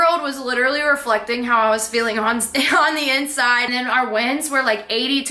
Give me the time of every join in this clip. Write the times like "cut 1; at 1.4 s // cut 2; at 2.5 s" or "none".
cut 1; at 3.7 s